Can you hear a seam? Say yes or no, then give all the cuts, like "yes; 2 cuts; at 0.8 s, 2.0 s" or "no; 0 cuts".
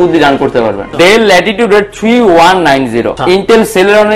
yes; 2 cuts; at 0.9 s, 3.1 s